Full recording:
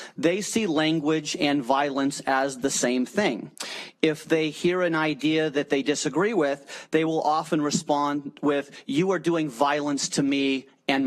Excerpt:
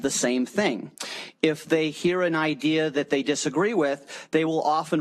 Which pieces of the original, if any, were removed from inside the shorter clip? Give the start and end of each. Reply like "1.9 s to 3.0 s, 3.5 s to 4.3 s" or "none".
none